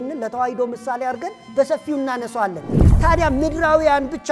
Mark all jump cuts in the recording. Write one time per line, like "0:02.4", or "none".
0:02.8